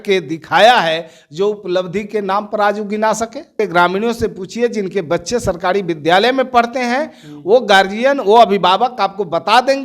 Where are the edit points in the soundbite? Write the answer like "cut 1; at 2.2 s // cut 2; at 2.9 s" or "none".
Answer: cut 1; at 3.5 s